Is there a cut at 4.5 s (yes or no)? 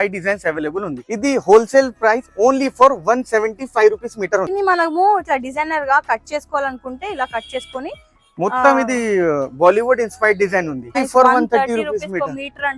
yes